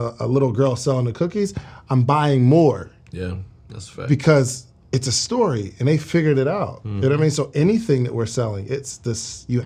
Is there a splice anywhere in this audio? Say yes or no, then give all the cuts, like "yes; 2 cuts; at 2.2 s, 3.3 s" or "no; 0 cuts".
no; 0 cuts